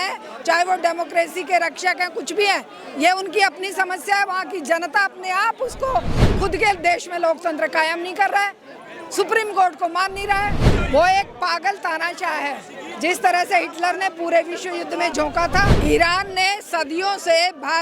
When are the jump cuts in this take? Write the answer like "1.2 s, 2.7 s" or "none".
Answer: 6.2 s, 10.7 s, 15.7 s